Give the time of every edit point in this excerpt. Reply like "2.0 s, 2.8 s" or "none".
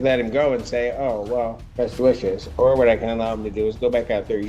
1.6 s

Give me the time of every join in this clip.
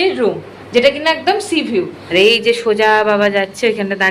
2.0 s

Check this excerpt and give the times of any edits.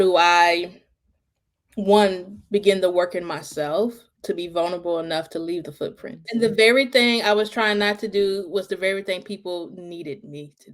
6.2 s

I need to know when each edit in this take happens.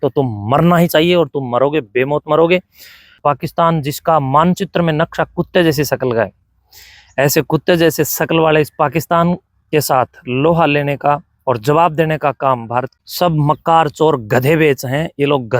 3.2 s, 12.9 s

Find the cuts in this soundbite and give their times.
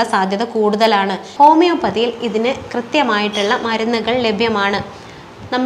1.2 s

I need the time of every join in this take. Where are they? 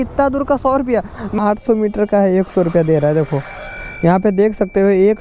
1.4 s

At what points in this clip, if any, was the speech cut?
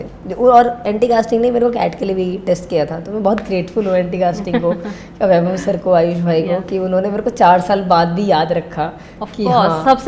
none

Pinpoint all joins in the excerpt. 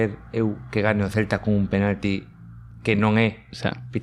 none

